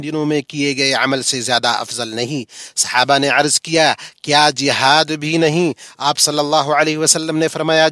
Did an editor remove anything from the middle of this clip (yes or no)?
no